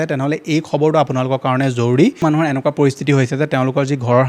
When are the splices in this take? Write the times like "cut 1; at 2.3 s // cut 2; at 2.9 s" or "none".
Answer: cut 1; at 2.2 s